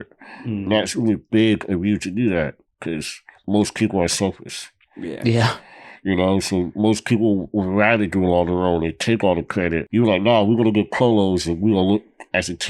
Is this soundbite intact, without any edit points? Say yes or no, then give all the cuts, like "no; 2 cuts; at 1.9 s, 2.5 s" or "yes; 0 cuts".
yes; 0 cuts